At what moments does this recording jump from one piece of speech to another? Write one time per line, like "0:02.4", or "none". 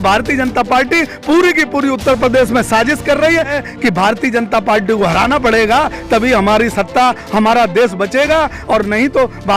0:03.5